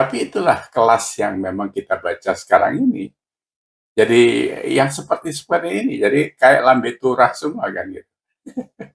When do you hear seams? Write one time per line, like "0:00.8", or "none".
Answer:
none